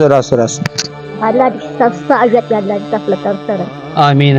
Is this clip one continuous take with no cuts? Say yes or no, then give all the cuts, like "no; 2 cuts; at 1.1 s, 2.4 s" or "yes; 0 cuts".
no; 1 cut; at 1.0 s